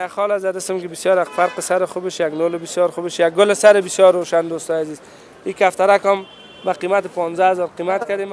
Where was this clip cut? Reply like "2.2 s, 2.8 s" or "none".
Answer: none